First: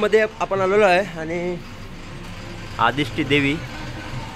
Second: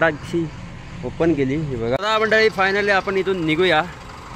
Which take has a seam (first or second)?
second